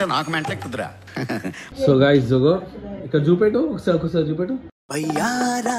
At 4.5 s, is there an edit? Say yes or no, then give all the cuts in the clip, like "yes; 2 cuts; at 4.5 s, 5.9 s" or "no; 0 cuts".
no; 1 cut; at 1.6 s